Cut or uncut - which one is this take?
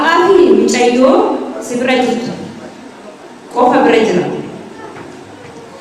uncut